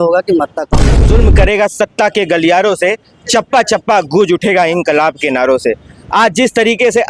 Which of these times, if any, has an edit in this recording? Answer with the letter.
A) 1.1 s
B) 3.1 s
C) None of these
A